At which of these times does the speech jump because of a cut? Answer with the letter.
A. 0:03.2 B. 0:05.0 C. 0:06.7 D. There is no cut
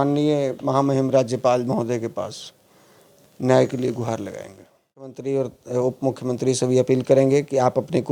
B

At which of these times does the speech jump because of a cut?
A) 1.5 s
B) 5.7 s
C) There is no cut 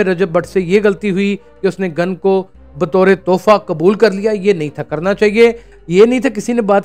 B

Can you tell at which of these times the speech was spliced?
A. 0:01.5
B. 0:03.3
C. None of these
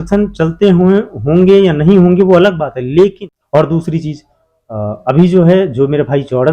B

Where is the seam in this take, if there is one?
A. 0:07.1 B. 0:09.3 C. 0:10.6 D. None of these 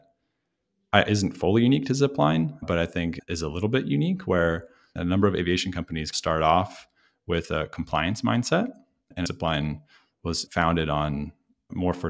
B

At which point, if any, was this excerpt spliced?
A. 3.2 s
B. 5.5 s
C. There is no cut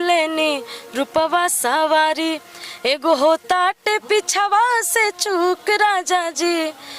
C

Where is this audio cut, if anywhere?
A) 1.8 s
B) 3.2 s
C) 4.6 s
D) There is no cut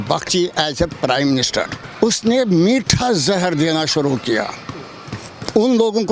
A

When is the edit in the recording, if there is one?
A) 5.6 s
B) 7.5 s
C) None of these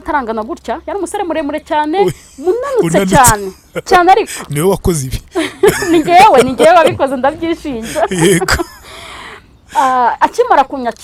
C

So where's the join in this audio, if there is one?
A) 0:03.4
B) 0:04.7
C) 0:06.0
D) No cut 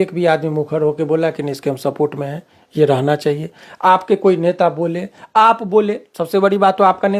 D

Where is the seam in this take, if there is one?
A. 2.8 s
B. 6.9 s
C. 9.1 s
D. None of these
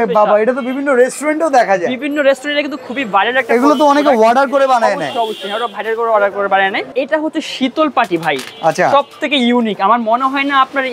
B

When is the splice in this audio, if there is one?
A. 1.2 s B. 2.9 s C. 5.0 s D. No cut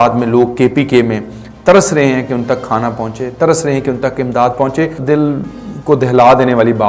C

